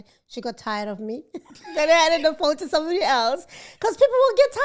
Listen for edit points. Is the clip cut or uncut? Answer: uncut